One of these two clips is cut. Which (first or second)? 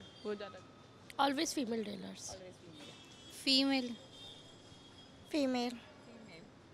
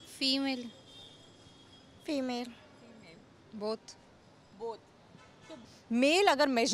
second